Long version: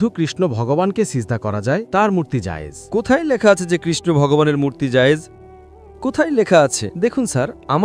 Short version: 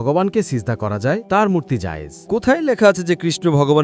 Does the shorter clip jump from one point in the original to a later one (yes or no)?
no